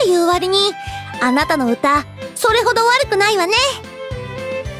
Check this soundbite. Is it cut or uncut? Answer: cut